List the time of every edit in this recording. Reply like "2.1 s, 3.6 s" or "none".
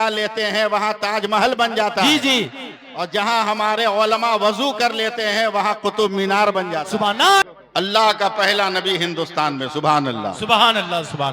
7.4 s